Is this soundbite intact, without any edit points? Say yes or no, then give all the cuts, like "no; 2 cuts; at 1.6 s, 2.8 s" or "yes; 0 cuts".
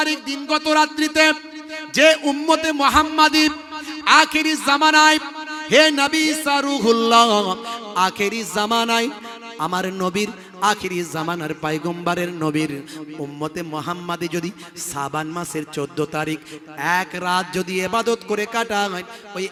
yes; 0 cuts